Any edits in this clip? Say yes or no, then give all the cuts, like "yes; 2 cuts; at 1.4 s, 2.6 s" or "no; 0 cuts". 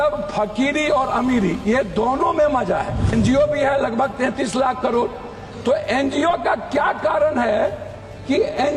yes; 1 cut; at 3.1 s